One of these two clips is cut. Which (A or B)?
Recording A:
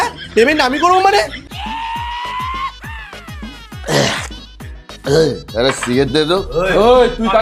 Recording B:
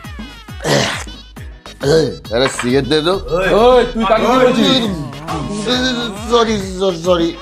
A